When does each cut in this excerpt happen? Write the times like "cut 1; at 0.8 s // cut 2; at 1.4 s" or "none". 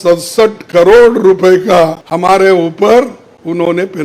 cut 1; at 2.0 s